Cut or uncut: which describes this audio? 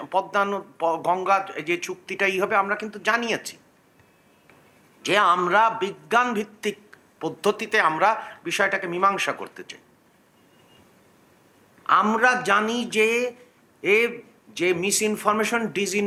uncut